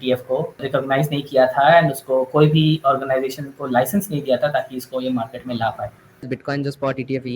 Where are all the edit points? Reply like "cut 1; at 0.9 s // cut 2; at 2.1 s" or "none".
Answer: cut 1; at 6.3 s